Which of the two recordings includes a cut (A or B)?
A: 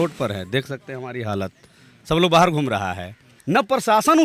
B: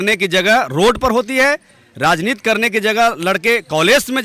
A